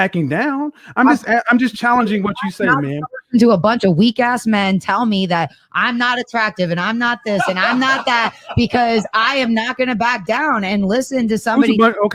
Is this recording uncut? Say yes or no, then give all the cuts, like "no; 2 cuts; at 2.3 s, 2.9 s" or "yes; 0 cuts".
yes; 0 cuts